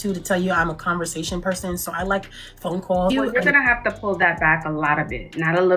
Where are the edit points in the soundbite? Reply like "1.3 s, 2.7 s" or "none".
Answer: 3.1 s